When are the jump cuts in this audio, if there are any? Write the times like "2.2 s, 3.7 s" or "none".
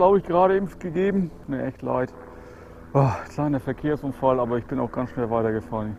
1.4 s